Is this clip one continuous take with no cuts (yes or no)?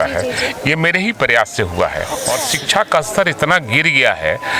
no